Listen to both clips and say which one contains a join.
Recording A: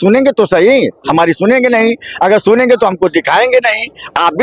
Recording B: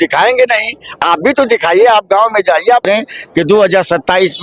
B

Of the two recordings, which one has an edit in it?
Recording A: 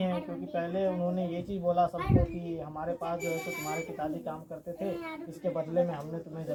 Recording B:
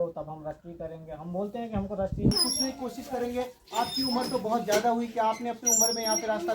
B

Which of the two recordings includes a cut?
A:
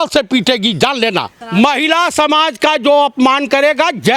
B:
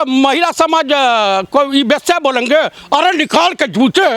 A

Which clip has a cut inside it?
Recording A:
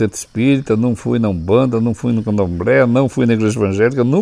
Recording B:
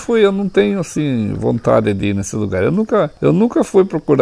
B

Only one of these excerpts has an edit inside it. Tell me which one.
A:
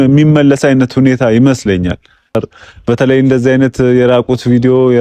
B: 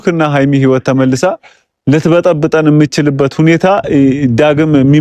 A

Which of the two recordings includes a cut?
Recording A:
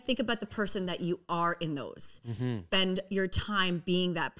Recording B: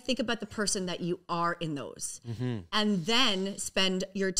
A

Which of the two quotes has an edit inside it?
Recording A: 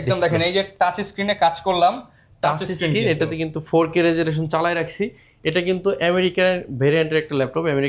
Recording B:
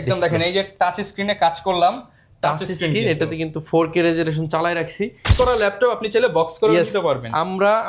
B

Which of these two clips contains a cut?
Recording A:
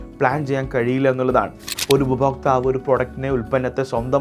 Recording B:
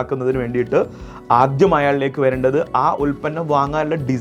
A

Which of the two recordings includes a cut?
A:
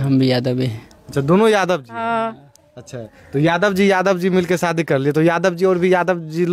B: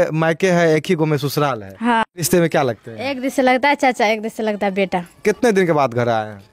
B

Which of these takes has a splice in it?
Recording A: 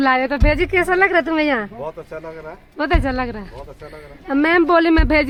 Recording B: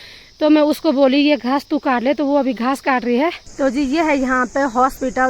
B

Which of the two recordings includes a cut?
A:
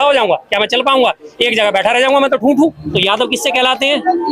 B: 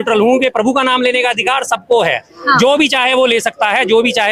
A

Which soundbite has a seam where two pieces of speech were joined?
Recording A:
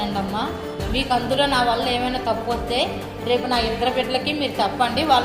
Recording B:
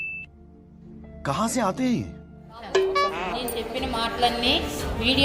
B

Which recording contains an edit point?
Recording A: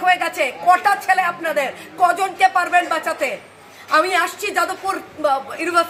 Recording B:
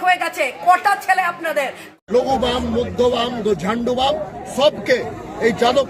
B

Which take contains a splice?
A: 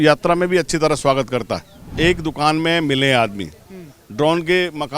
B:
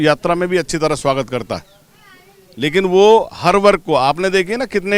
A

